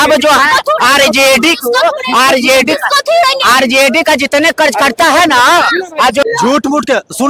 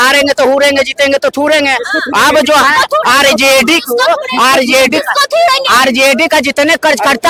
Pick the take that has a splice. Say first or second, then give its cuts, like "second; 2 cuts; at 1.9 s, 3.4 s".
first; 1 cut; at 6.2 s